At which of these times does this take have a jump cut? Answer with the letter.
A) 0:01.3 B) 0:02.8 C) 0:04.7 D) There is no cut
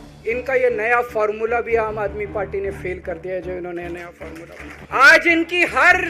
C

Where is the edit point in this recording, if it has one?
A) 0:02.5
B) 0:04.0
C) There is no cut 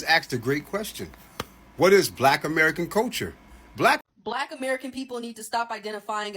B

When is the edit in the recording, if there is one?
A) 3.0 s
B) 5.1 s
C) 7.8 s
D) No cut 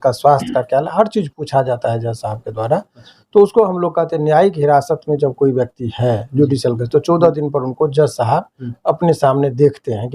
D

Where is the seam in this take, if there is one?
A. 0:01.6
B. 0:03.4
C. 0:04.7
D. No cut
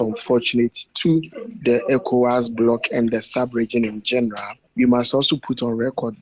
D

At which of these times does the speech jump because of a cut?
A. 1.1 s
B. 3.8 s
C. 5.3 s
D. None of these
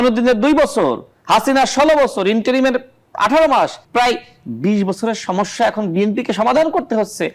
B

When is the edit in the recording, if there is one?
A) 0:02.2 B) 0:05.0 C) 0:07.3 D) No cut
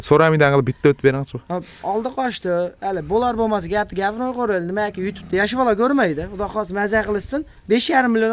D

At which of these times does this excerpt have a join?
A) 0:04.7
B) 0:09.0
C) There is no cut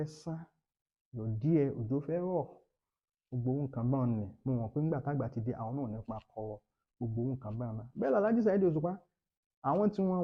C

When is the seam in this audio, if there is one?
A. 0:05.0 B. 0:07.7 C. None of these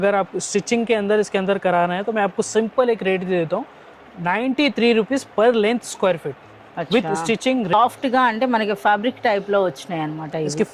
B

